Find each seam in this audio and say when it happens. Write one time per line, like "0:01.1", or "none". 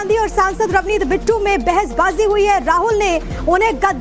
0:02.6

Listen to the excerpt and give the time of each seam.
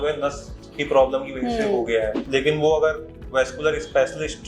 0:02.2

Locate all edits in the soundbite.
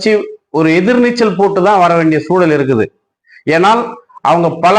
none

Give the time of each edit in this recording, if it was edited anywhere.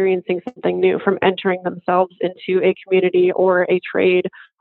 none

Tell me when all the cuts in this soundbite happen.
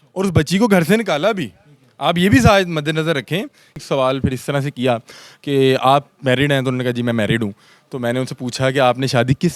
0:03.8

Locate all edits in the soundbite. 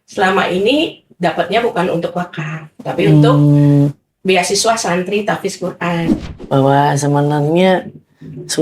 0:06.1

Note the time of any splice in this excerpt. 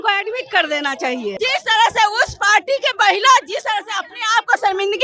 0:01.3

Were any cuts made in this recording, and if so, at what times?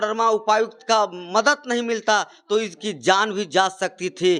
none

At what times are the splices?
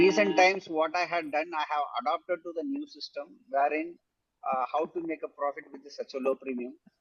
none

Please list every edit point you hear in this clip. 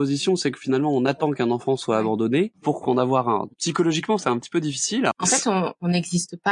0:02.6
0:03.5
0:05.1

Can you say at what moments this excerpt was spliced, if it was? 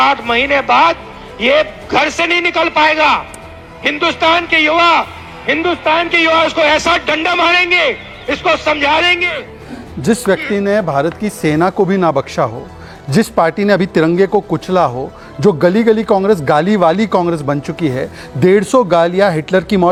none

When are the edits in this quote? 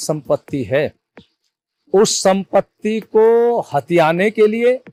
none

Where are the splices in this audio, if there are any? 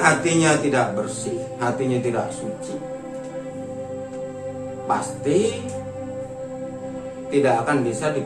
0:05.6
0:07.3

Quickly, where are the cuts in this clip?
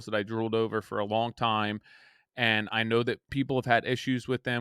0:03.3

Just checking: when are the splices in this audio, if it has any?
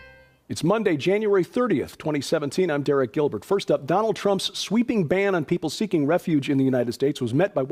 0:05.7

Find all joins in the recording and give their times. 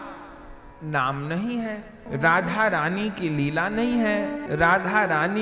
0:01.9
0:04.4

